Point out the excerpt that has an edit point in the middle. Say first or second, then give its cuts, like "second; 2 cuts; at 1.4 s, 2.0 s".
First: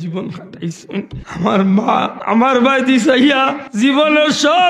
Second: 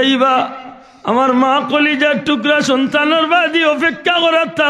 first; 3 cuts; at 1.2 s, 2.2 s, 3.6 s